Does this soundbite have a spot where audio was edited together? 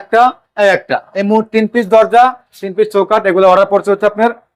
no; 0 cuts

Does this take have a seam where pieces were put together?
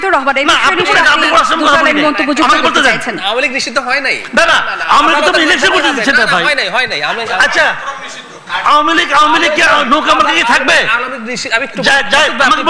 no; 0 cuts

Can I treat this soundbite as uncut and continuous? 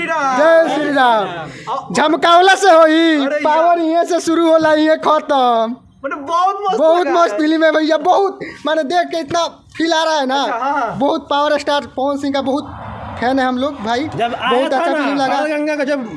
yes; 0 cuts

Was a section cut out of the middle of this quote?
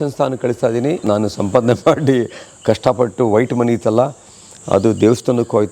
yes; 1 cut; at 1.0 s

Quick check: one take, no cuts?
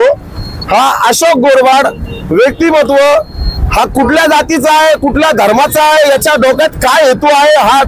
yes; 0 cuts

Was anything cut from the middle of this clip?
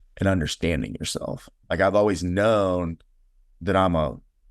yes; 1 cut; at 1.6 s

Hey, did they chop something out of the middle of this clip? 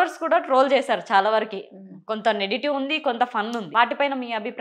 yes; 1 cut; at 3.7 s

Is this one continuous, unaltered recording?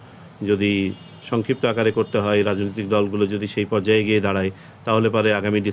yes; 0 cuts

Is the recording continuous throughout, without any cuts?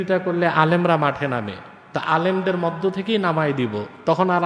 yes; 0 cuts

